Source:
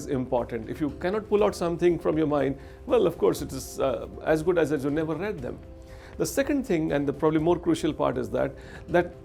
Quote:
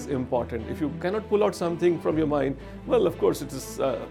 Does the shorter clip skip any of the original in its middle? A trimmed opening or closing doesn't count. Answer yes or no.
no